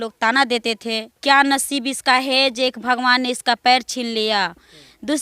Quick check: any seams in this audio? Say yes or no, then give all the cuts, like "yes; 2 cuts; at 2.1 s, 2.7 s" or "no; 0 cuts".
yes; 1 cut; at 1.1 s